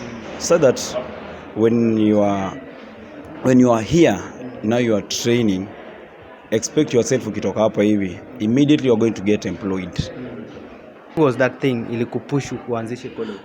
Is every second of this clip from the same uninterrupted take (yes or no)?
no